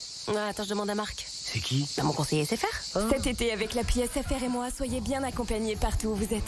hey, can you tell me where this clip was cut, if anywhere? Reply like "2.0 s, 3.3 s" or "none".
none